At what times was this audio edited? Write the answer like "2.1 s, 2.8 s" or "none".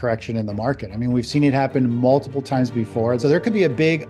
3.2 s